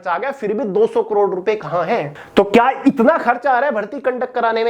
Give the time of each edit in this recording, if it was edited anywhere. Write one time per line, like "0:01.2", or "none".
0:02.2